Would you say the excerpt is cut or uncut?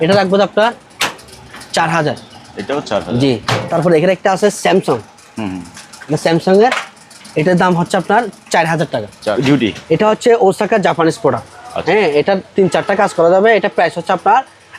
cut